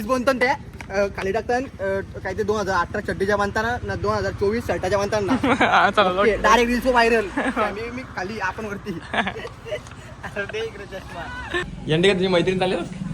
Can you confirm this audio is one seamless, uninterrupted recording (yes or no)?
no